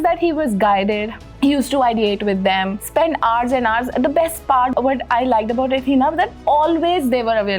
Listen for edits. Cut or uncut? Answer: uncut